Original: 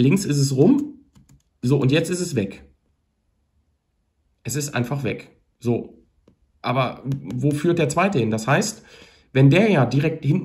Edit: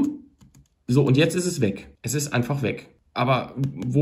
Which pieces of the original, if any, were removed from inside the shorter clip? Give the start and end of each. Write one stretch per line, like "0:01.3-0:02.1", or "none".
0:02.7-0:04.3
0:05.4-0:06.4